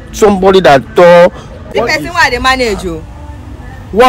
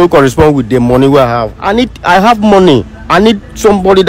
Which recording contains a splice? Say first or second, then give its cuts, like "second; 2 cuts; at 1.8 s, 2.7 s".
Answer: first; 1 cut; at 1.6 s